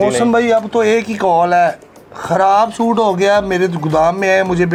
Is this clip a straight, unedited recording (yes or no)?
yes